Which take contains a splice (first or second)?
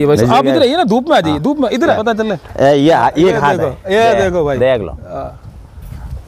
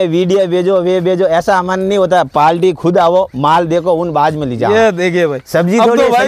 first